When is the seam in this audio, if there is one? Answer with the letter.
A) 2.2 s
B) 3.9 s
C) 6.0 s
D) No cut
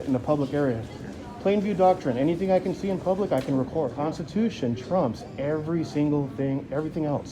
B